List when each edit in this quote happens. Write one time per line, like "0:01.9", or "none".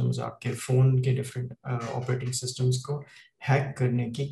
none